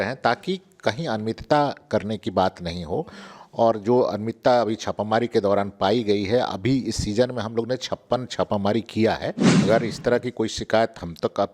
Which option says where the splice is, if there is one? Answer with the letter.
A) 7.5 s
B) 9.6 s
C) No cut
B